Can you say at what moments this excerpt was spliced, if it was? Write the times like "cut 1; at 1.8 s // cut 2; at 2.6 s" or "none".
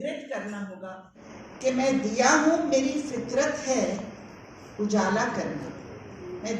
cut 1; at 1.3 s